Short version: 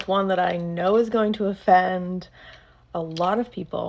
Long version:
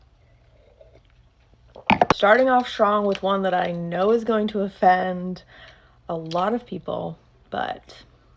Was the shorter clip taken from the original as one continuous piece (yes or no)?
yes